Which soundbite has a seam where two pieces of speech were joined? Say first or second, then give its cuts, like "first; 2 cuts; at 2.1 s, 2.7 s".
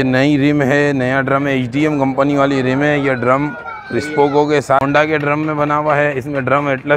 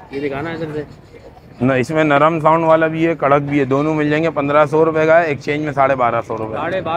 first; 1 cut; at 4.8 s